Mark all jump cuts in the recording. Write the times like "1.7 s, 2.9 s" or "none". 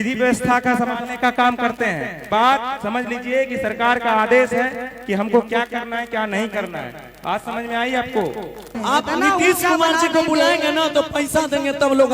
2.2 s, 8.7 s